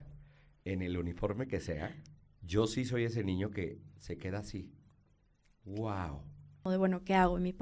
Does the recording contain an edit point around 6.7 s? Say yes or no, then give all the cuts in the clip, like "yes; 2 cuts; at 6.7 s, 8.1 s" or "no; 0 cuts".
yes; 1 cut; at 6.7 s